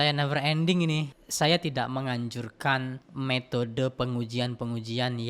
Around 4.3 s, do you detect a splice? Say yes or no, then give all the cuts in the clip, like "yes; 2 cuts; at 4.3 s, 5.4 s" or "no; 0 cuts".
no; 2 cuts; at 1.1 s, 3.0 s